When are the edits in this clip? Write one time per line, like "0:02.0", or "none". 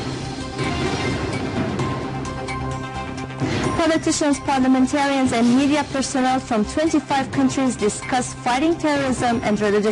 0:01.8